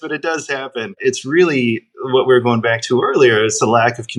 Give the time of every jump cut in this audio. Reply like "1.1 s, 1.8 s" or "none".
none

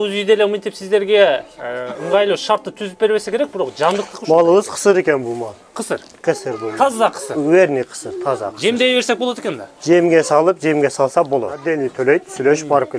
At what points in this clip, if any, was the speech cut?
11.7 s

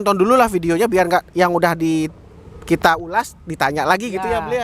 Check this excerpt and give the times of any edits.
none

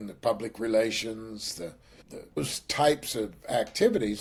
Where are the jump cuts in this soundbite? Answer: none

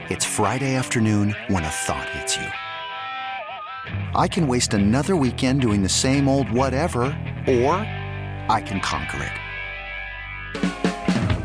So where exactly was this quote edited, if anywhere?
none

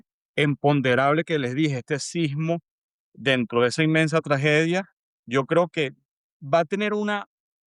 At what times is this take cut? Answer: none

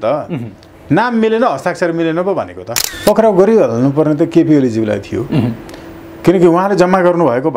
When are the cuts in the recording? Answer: 2.9 s

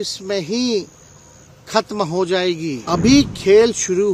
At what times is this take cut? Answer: 2.8 s

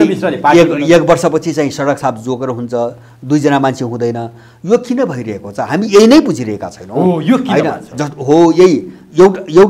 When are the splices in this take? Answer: none

